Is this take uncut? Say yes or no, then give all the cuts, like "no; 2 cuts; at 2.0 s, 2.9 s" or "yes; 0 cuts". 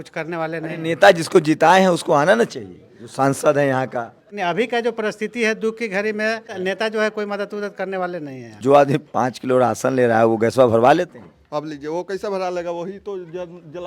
no; 3 cuts; at 4.3 s, 6.5 s, 8.6 s